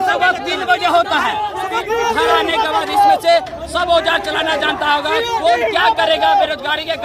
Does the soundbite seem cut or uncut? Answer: cut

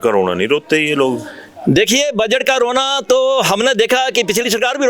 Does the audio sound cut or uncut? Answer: uncut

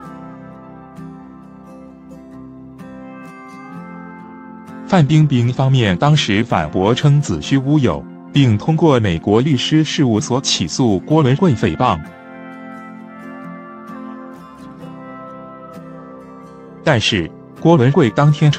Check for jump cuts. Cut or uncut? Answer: uncut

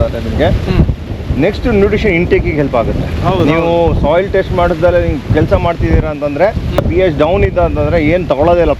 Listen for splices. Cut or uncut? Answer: cut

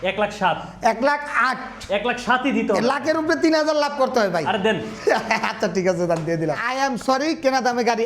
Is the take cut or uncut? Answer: cut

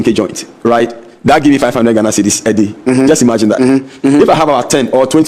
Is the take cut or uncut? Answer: uncut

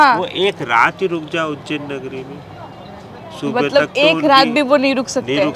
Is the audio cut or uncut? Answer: uncut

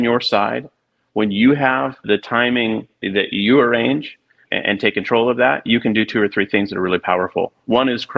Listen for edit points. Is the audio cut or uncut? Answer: cut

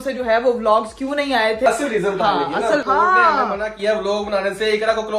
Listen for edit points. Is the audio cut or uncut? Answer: cut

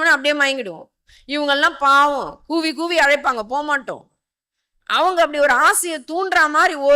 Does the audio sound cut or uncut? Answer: uncut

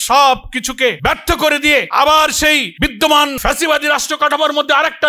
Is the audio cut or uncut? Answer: cut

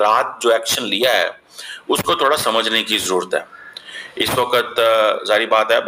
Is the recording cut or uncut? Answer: uncut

